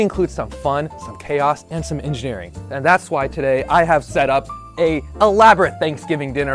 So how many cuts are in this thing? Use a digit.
0